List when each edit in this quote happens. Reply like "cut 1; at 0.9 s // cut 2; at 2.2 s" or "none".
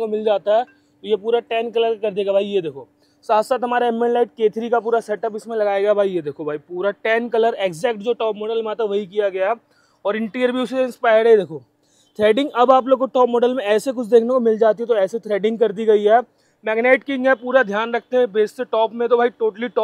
none